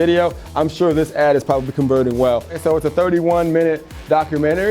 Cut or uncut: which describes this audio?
cut